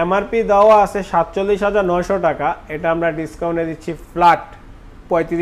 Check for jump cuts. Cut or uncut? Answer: uncut